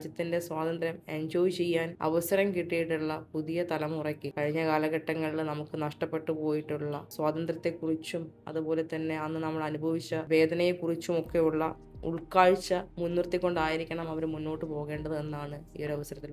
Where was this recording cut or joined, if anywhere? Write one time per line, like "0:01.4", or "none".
0:01.9
0:04.3
0:07.1
0:10.2
0:12.9